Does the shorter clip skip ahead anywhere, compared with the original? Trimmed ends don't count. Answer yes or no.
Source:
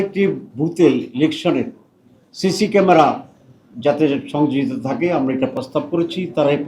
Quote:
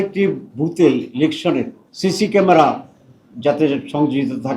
yes